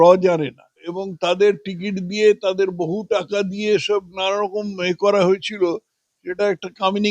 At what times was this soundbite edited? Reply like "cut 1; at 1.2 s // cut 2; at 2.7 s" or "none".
cut 1; at 1.0 s